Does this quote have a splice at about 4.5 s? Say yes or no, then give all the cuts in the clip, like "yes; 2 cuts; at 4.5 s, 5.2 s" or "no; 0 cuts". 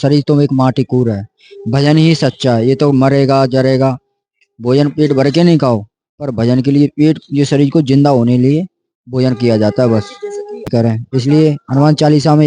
no; 1 cut; at 10.7 s